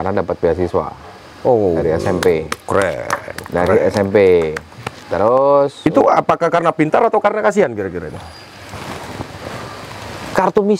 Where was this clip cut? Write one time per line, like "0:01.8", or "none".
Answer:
none

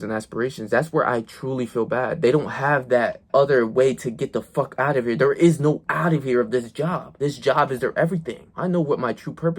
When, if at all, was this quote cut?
0:03.2

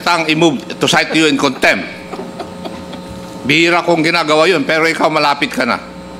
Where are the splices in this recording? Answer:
none

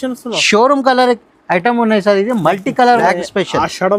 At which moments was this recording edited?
0:03.0

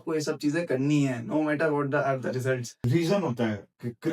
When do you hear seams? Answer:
0:02.7

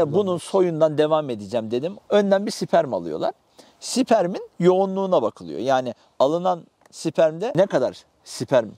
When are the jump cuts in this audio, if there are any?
0:01.9
0:07.5

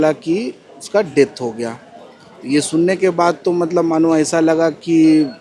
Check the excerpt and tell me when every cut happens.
none

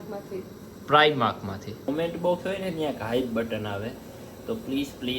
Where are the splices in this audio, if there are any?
0:01.9

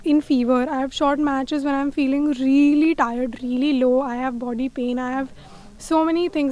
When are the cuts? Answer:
none

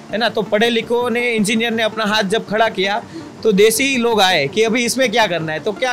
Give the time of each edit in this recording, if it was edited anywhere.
none

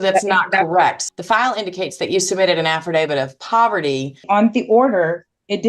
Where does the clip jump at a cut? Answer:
0:01.0
0:04.2

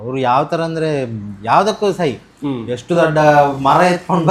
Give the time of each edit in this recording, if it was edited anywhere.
none

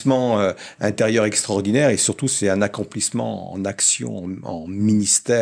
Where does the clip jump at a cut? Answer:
none

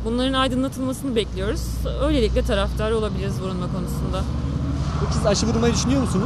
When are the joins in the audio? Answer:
none

